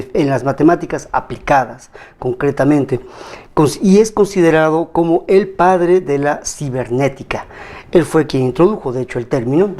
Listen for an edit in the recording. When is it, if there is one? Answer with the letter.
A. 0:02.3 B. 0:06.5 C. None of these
B